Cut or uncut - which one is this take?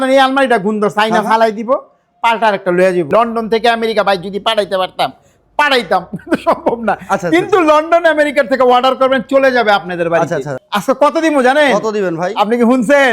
cut